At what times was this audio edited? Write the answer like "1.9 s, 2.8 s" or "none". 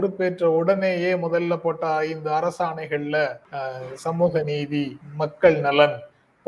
3.5 s, 5.0 s